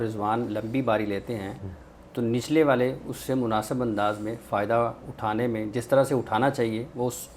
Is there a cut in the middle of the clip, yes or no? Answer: no